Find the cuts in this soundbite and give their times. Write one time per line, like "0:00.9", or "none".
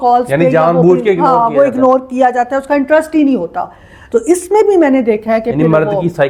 none